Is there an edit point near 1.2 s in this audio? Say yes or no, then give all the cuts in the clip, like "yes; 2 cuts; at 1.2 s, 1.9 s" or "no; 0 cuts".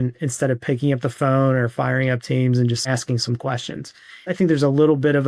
no; 2 cuts; at 2.8 s, 4.2 s